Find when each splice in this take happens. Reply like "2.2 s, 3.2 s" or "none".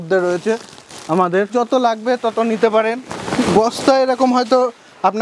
1.5 s, 3.1 s